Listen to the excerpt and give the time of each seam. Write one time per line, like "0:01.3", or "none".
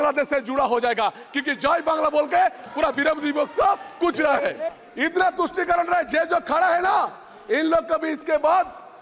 0:04.7